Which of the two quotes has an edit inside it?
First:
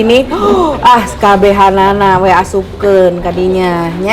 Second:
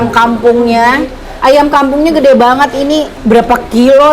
second; 1 cut; at 3.1 s

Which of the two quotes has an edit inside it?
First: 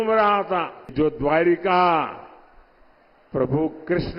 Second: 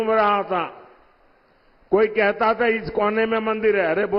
first; 1 cut; at 0.9 s

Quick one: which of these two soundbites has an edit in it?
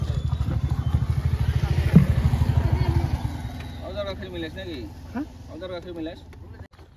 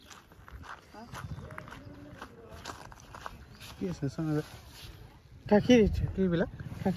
second; 1 cut; at 4.2 s

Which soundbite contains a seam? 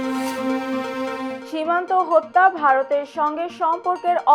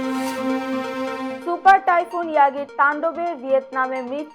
first; 1 cut; at 1.4 s

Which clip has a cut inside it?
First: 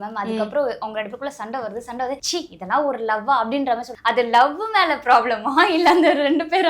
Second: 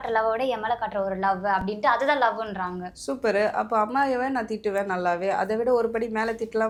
first; 2 cuts; at 2.2 s, 3.9 s

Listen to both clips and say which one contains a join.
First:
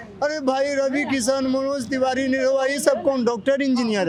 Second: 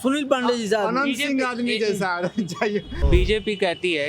second; 1 cut; at 3.0 s

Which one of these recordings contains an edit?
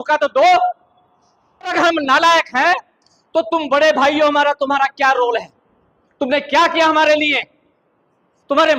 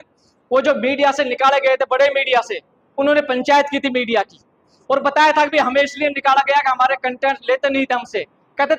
first; 1 cut; at 1.7 s

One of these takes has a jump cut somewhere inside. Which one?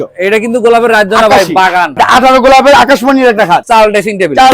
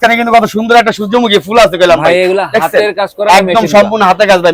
first; 2 cuts; at 1.9 s, 3.6 s

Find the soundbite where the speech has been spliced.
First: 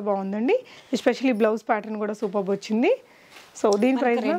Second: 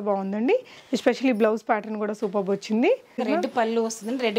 second; 1 cut; at 3.2 s

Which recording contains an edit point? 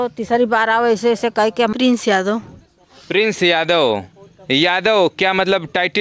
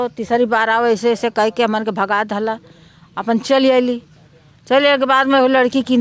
first; 1 cut; at 1.7 s

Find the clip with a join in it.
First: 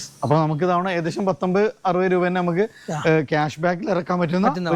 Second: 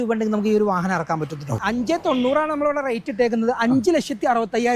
second; 1 cut; at 1.6 s

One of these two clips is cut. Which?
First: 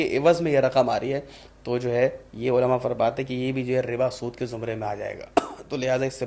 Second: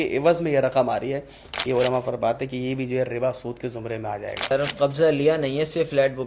second; 2 cuts; at 1.5 s, 4.5 s

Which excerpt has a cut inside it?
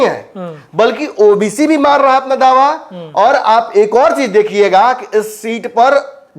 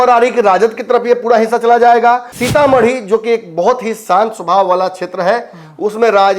second; 1 cut; at 2.3 s

